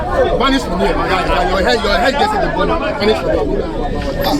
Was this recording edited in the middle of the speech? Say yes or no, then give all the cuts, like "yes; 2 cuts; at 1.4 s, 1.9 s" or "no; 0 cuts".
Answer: no; 0 cuts